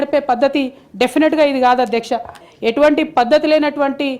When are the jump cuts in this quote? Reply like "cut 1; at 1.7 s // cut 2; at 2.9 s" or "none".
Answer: cut 1; at 2.4 s

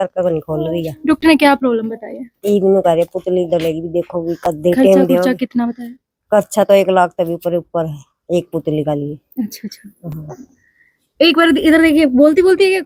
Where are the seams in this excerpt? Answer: none

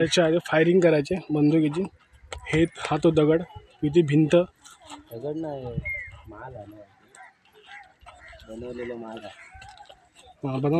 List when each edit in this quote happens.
none

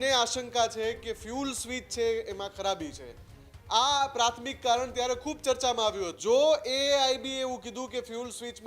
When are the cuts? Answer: cut 1; at 6.2 s

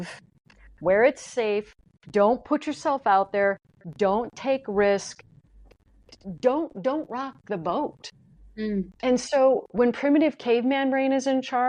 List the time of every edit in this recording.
none

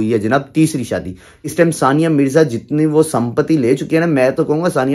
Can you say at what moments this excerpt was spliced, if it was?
cut 1; at 1.5 s

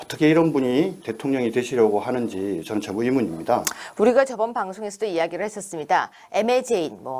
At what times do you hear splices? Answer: cut 1; at 2.6 s

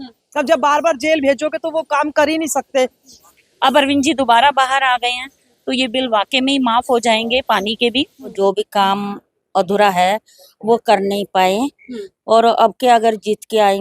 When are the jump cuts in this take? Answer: cut 1; at 3.1 s // cut 2; at 8.3 s

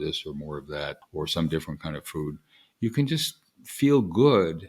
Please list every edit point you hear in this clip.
cut 1; at 1.0 s

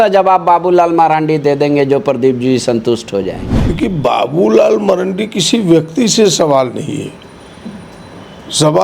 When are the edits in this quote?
cut 1; at 3.5 s

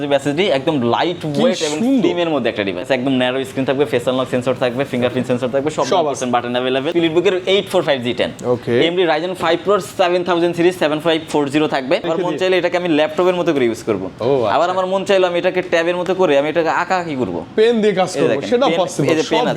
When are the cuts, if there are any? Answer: cut 1; at 2.8 s // cut 2; at 6.9 s // cut 3; at 12.1 s

